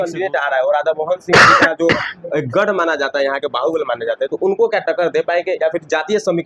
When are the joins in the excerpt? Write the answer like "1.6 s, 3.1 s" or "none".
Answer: none